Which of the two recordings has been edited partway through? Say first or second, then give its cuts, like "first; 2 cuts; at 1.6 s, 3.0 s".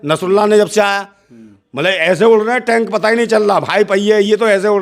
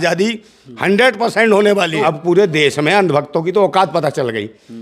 second; 1 cut; at 2.0 s